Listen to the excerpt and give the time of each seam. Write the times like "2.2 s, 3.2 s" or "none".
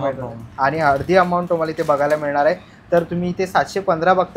none